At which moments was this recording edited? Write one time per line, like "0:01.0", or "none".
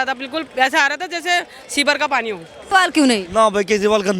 0:02.5